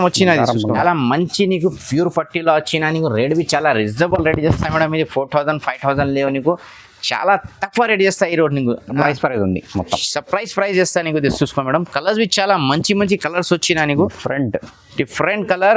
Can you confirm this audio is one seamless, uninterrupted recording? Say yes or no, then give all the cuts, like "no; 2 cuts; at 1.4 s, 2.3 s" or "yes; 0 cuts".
no; 2 cuts; at 0.8 s, 9.0 s